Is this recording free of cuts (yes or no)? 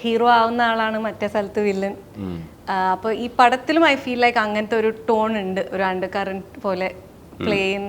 yes